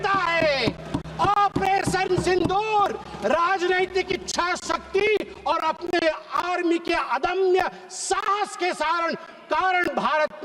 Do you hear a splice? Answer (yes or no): no